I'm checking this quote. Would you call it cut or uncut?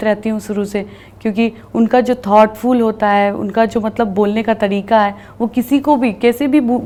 uncut